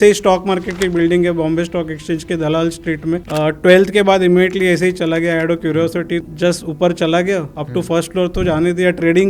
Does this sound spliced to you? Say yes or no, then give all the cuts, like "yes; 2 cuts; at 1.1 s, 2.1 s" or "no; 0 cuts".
yes; 2 cuts; at 3.3 s, 6.2 s